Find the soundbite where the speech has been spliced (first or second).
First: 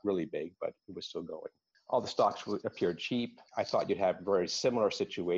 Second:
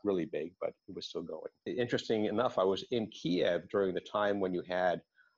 second